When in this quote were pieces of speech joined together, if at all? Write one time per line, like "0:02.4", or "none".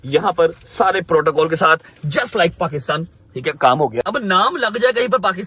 0:04.0